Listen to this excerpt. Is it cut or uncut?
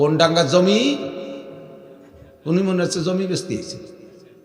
uncut